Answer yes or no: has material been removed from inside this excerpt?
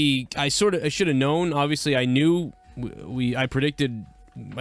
no